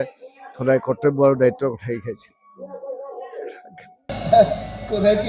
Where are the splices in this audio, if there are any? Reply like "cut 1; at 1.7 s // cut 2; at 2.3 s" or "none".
cut 1; at 4.1 s